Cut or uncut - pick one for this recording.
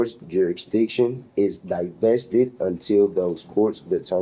uncut